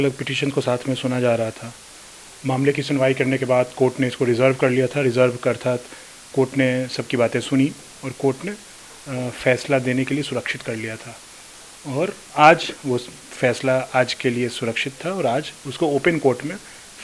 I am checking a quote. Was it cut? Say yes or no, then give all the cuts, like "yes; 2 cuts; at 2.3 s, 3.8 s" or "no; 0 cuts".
no; 0 cuts